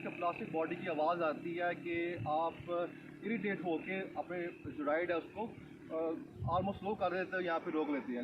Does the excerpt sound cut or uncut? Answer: uncut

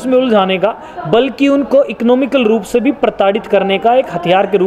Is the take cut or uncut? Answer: uncut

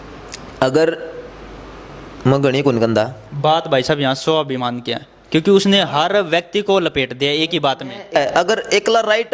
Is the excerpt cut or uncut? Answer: cut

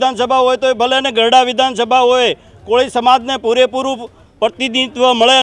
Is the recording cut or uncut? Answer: uncut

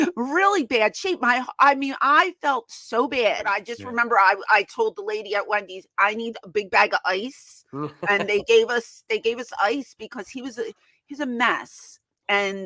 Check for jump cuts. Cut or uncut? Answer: cut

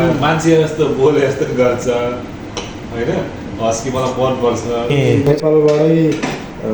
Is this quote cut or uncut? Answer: cut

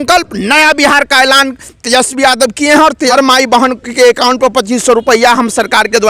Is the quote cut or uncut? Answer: cut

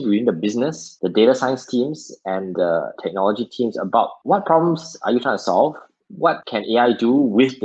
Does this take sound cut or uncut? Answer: uncut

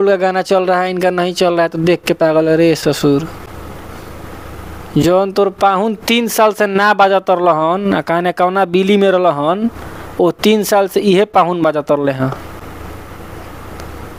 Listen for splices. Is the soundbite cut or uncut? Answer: uncut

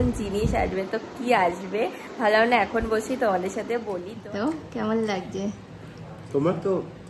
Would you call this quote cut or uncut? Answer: cut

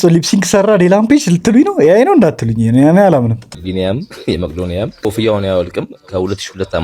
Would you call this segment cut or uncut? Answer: cut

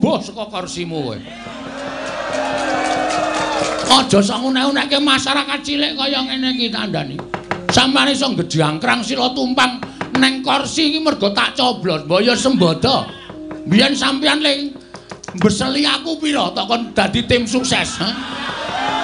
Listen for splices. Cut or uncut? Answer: uncut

